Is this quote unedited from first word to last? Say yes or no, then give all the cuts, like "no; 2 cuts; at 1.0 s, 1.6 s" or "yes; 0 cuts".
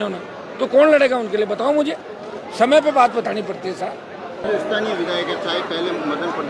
yes; 0 cuts